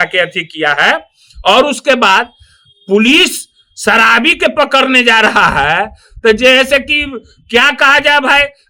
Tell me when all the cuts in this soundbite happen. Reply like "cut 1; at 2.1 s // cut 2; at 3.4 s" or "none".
none